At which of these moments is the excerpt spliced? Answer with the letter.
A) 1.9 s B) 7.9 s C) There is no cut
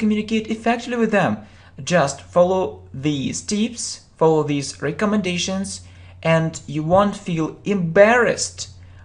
A